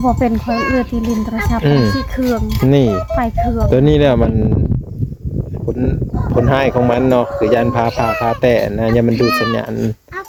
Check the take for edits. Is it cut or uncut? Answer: uncut